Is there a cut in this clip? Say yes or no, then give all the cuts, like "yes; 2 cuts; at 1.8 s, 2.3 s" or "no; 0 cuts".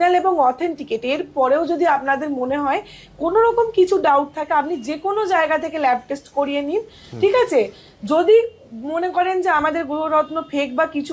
no; 0 cuts